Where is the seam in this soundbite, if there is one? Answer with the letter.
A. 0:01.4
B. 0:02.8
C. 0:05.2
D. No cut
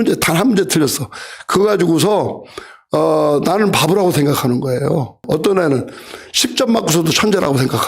C